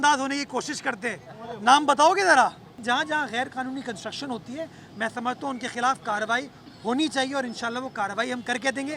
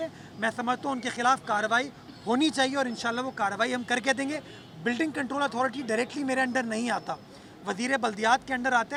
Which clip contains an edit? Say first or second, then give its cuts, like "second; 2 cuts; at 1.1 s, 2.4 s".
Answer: first; 1 cut; at 2.8 s